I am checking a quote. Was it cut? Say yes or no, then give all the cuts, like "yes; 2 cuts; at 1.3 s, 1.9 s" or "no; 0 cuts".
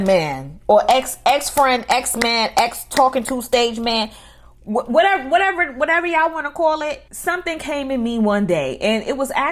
no; 0 cuts